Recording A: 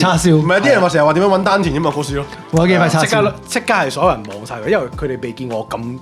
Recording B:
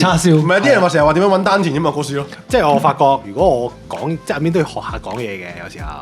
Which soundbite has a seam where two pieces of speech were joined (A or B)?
B